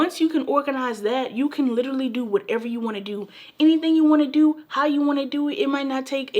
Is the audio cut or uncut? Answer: uncut